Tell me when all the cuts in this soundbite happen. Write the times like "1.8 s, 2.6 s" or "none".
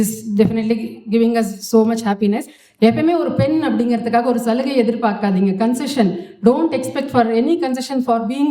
2.6 s